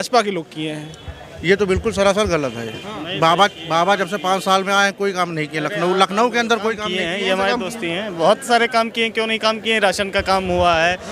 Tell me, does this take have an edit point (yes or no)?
no